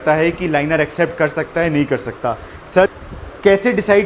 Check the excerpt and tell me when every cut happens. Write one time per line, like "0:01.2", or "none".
0:02.9